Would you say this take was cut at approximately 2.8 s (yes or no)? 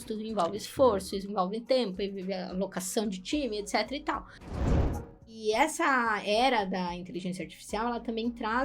no